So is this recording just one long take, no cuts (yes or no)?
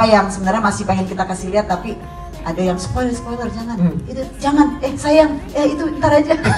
yes